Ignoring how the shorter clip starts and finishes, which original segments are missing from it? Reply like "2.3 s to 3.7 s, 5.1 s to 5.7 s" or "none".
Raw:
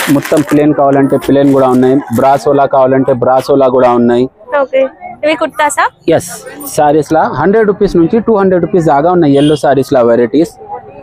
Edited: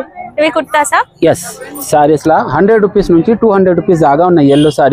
none